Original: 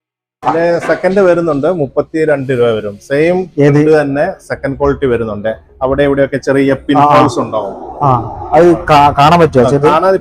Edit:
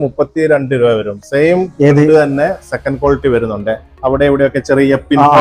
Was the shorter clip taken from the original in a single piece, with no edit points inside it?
yes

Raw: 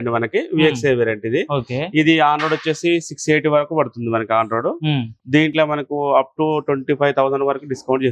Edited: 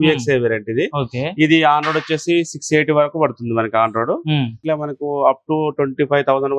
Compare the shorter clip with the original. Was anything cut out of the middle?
yes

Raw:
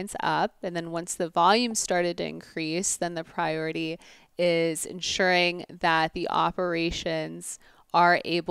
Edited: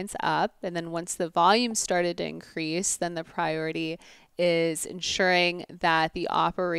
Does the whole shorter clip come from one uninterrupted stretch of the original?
yes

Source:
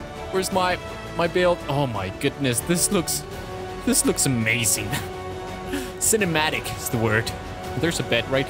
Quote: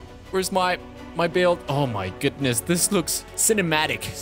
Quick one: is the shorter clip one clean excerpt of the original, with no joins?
no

